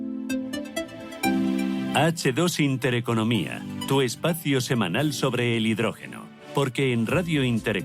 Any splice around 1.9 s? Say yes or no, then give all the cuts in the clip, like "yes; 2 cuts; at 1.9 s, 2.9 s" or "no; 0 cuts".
yes; 1 cut; at 1.9 s